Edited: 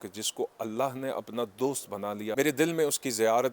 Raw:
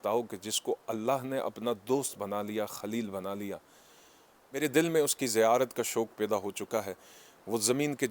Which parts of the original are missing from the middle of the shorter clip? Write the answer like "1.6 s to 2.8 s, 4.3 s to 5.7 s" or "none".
2.6 s to 4.5 s